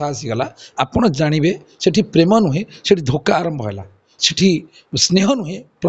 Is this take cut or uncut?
uncut